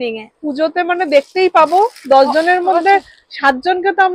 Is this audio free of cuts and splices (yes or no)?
yes